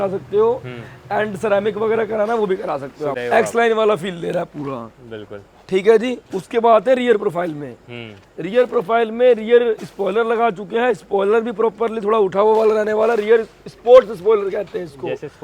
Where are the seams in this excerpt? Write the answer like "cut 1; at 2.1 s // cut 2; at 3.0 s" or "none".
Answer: cut 1; at 3.2 s